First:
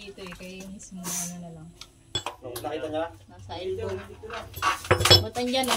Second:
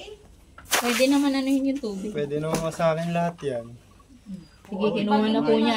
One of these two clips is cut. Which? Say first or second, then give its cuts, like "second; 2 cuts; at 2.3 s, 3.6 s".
first; 1 cut; at 2.2 s